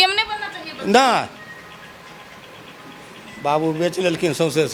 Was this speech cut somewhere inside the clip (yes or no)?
no